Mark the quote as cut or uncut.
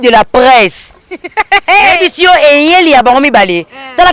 uncut